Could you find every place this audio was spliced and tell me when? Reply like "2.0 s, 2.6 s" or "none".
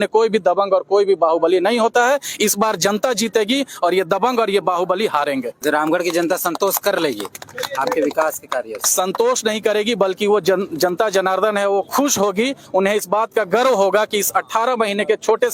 5.5 s

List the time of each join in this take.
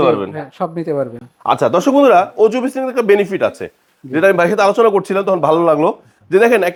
none

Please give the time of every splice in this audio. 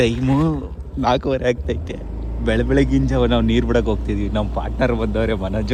none

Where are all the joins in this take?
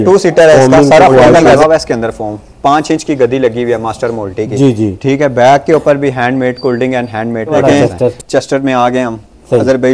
1.6 s, 7.5 s

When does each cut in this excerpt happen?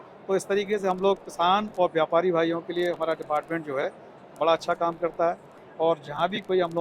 5.6 s

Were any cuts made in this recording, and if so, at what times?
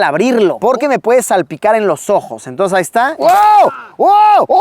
3.1 s

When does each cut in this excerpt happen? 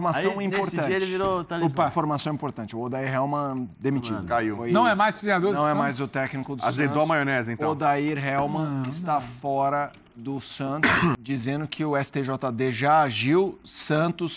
11.2 s

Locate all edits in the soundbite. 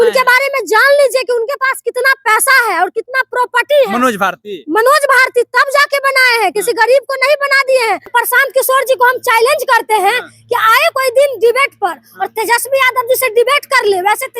8.1 s

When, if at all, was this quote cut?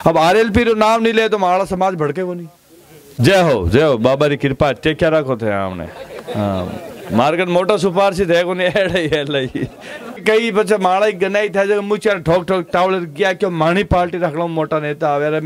3.0 s, 10.2 s

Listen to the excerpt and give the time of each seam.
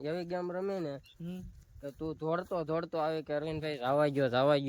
none

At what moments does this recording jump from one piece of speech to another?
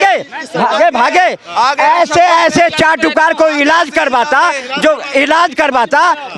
none

